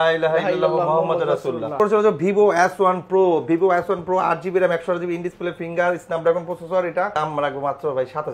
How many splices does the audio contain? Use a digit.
2